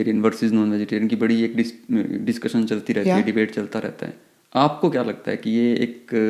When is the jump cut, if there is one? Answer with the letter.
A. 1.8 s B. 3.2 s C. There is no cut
C